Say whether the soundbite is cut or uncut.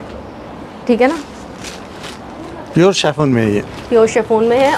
uncut